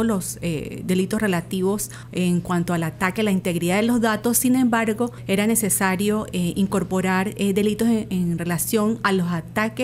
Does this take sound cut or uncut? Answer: cut